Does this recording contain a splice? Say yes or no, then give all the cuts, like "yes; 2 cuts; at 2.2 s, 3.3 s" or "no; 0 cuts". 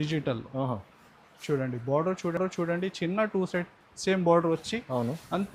no; 0 cuts